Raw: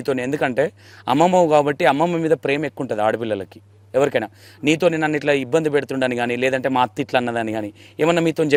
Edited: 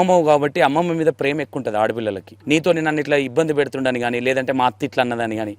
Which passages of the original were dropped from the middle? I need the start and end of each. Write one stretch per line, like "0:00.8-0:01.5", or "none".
0:03.5-0:04.5